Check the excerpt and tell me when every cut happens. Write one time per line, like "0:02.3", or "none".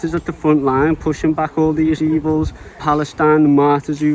0:02.8